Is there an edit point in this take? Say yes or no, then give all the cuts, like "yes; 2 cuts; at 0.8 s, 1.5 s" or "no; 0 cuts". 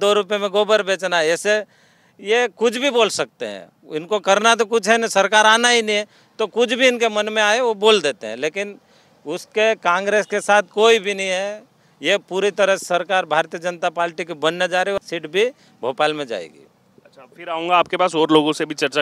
no; 0 cuts